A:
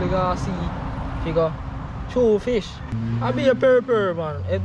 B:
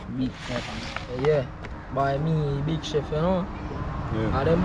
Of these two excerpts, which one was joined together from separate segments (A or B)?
A